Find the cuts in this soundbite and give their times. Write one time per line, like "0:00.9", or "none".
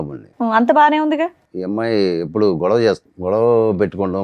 0:01.5
0:03.1